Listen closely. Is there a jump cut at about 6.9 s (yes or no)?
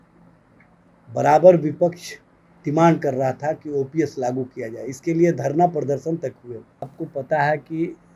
yes